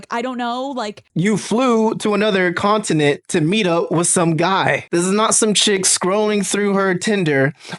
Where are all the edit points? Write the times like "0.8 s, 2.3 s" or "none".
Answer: 4.8 s